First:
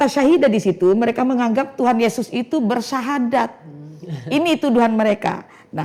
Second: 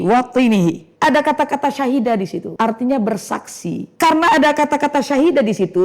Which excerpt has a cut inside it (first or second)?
second